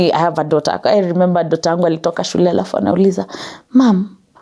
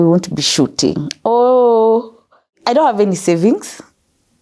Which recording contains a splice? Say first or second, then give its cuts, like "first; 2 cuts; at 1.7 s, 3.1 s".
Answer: second; 1 cut; at 2.6 s